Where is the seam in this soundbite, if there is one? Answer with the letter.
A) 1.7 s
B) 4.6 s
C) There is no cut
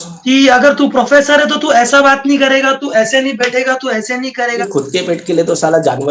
B